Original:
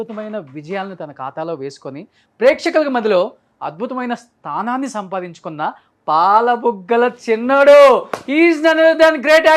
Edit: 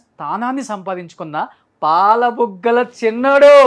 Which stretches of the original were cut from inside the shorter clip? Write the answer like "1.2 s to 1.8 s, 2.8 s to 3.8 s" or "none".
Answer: none